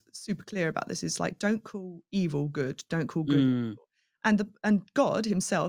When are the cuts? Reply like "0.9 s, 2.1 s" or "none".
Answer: none